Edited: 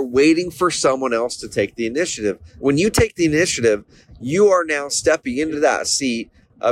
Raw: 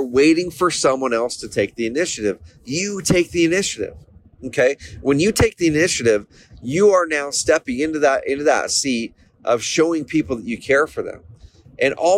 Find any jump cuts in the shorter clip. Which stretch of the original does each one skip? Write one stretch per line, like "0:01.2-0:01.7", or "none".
0:02.5-0:04.9
0:08.0-0:08.4